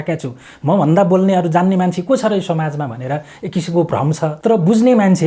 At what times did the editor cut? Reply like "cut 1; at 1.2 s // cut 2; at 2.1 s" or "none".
cut 1; at 4.4 s

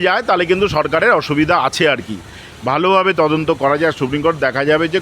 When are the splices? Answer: cut 1; at 2.5 s

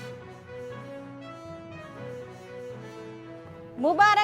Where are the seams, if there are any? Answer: none

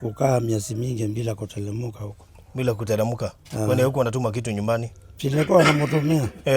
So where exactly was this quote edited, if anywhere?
none

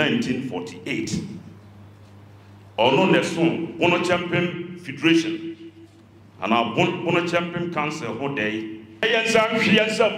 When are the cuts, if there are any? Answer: cut 1; at 9.0 s

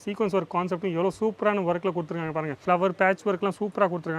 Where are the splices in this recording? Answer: cut 1; at 2.5 s

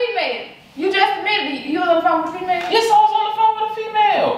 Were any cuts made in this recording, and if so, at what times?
none

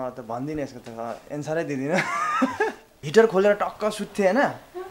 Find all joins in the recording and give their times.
cut 1; at 3.0 s

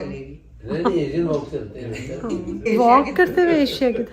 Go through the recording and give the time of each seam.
cut 1; at 2.6 s

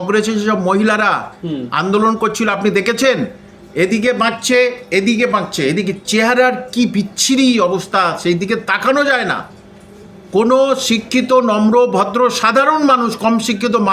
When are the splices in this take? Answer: none

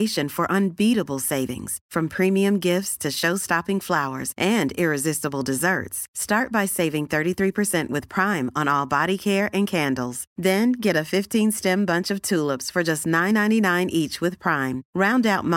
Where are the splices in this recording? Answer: none

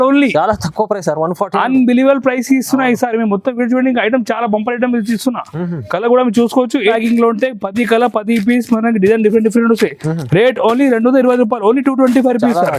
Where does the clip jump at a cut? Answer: cut 1; at 6.9 s

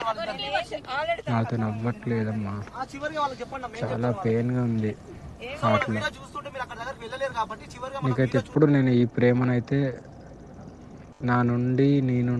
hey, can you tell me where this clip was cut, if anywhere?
none

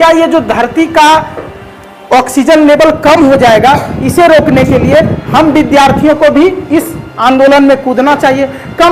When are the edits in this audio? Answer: none

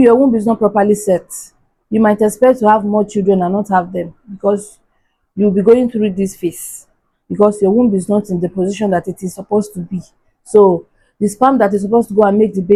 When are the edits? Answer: none

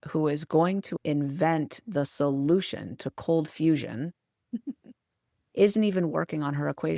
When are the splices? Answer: cut 1; at 0.9 s

